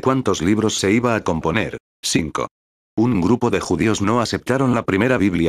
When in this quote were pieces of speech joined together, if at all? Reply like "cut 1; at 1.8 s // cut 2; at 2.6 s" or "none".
cut 1; at 1.9 s